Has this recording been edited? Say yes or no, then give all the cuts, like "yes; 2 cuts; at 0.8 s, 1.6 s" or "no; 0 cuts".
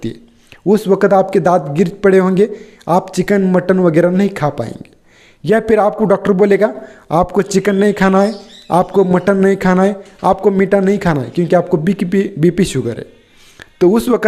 no; 0 cuts